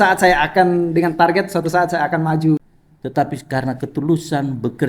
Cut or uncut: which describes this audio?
cut